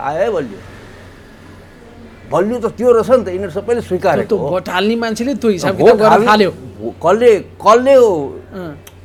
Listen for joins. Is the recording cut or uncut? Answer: uncut